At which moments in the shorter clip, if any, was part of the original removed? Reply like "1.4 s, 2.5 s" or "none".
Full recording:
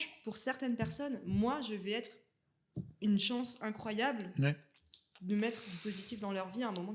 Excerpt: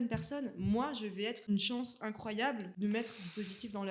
1.5 s, 2.7 s